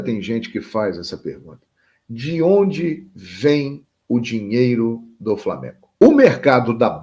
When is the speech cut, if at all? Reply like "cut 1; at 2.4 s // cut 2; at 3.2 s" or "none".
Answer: cut 1; at 5.9 s